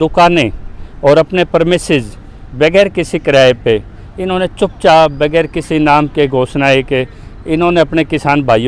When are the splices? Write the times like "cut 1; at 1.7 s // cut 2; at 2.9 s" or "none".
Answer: none